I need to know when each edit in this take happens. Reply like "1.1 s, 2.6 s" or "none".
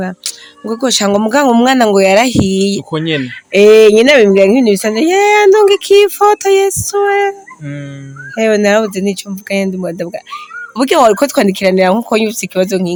none